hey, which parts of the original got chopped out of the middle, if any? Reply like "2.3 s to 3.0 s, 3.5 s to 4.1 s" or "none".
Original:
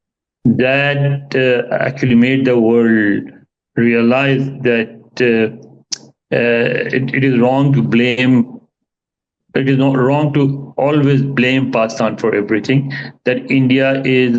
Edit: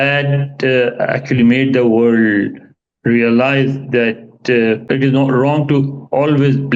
5.5 s to 9.5 s

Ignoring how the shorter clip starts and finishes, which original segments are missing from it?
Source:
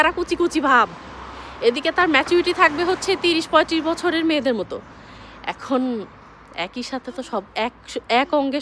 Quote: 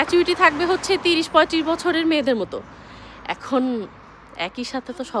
none

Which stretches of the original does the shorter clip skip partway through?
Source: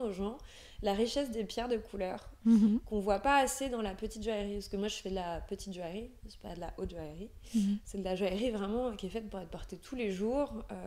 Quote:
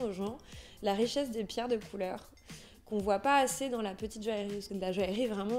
4.6 s to 7.9 s

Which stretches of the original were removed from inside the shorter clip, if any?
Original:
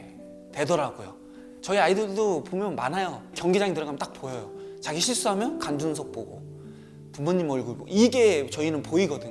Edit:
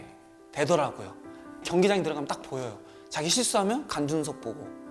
1.5 s to 3.2 s

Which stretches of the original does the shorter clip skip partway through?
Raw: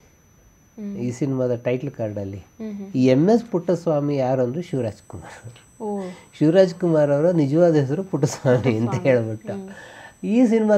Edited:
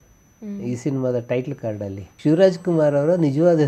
2.4 s to 6.2 s

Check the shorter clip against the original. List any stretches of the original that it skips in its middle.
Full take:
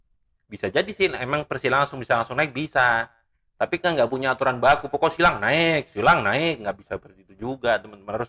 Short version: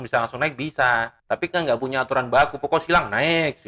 3.1 s to 3.5 s

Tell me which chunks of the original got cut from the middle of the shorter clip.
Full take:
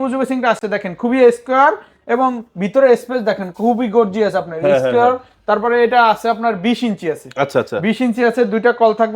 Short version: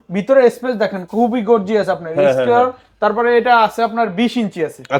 none

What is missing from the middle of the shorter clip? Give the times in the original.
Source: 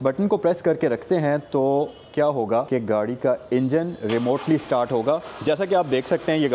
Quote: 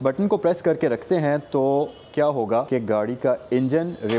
none

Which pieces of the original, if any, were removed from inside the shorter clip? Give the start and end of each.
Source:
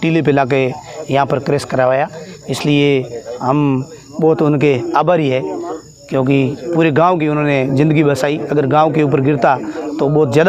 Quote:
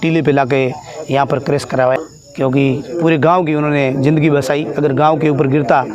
2.0 s to 5.7 s

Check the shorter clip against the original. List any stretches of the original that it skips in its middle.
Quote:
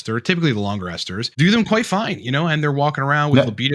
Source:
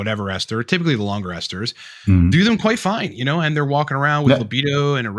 1.8 s to 2.3 s

